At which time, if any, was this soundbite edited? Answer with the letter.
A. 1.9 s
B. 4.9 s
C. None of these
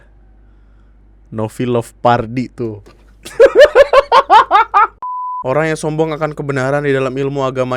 B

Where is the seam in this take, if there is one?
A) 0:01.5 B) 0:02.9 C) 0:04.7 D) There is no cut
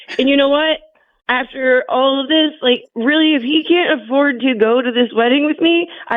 B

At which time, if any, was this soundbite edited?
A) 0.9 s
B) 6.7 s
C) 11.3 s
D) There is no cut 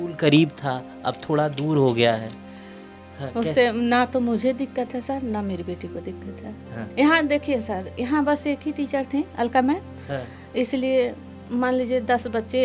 C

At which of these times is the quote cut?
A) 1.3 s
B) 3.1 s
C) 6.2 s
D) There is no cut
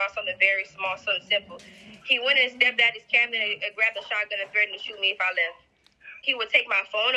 C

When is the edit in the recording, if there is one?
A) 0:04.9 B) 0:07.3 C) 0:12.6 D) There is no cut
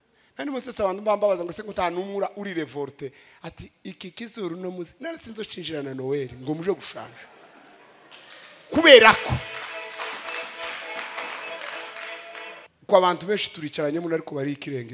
C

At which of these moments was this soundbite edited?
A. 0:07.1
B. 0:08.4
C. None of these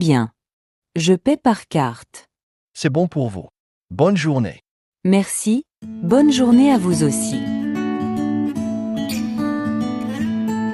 A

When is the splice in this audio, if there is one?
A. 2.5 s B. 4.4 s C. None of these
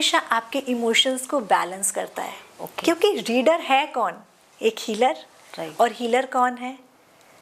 C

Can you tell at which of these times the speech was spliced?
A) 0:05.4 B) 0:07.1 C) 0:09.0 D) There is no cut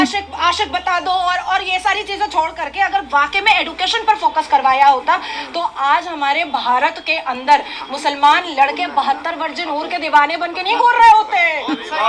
D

